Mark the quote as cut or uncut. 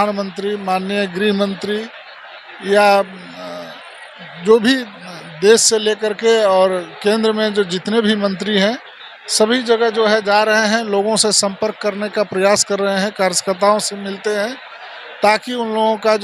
uncut